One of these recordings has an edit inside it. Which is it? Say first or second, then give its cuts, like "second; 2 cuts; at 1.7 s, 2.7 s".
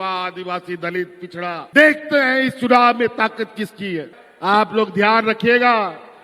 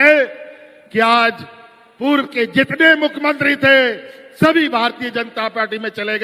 first; 1 cut; at 4.1 s